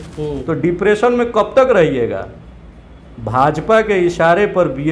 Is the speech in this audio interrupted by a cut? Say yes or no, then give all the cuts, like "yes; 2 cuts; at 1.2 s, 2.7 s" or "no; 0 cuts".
no; 0 cuts